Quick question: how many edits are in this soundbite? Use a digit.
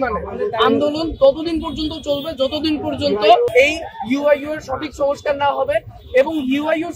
1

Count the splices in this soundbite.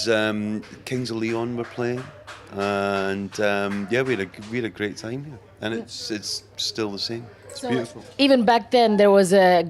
1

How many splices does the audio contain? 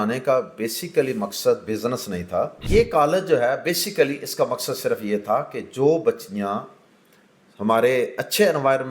1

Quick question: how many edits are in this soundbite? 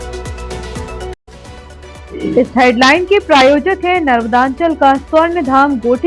1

